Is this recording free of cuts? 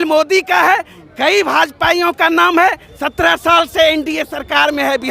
no; 1 cut; at 2.9 s

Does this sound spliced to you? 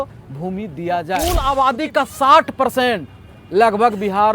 yes; 1 cut; at 1.4 s

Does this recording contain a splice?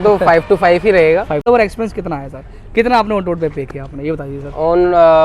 yes; 1 cut; at 1.5 s

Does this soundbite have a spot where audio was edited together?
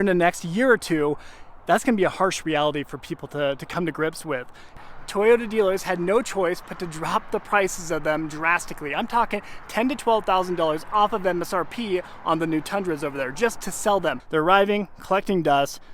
yes; 2 cuts; at 4.8 s, 14.2 s

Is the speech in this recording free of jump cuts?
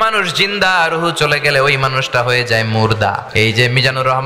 no; 1 cut; at 3.2 s

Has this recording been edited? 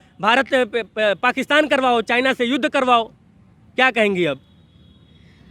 no; 0 cuts

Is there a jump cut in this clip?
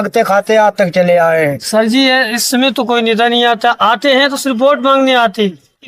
yes; 1 cut; at 1.6 s

